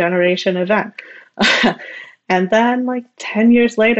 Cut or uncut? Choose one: uncut